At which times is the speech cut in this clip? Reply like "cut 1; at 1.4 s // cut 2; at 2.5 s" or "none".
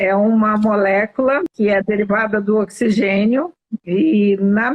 cut 1; at 1.5 s